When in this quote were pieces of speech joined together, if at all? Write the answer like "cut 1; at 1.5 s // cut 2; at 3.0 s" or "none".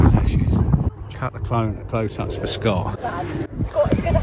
cut 1; at 0.9 s // cut 2; at 3.0 s

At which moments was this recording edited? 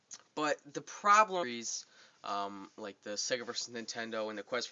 none

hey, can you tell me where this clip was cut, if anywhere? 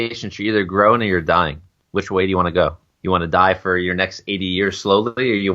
cut 1; at 2.9 s

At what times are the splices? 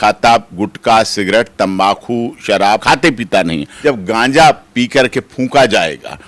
cut 1; at 2.8 s // cut 2; at 3.7 s

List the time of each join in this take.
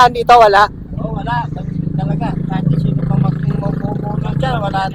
none

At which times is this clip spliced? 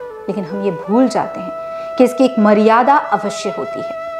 none

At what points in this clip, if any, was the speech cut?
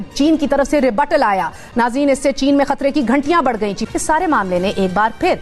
cut 1; at 1.6 s // cut 2; at 3.9 s

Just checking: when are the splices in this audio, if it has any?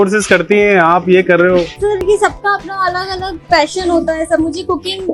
none

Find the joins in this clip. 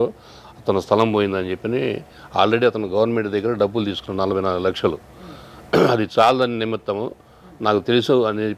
none

